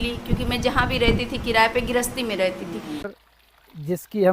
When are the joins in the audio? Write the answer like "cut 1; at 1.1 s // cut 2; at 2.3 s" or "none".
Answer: cut 1; at 3.1 s